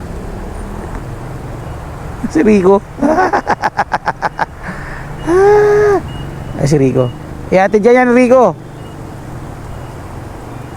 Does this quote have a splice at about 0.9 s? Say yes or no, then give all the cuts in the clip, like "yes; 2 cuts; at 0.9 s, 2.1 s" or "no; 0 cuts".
yes; 1 cut; at 0.9 s